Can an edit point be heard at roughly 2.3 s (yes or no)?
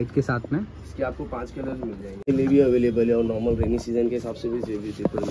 yes